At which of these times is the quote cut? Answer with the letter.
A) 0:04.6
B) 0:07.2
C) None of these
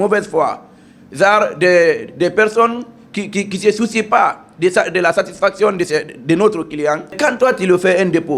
B